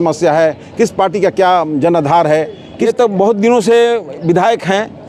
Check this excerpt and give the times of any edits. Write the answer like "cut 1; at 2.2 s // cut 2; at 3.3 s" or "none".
cut 1; at 2.7 s